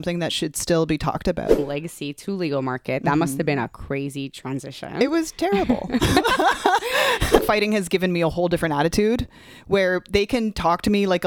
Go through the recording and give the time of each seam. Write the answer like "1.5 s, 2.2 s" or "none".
1.6 s, 7.4 s